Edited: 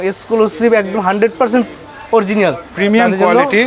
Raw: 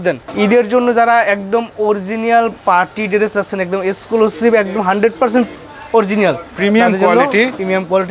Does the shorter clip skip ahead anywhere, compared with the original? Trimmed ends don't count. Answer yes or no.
no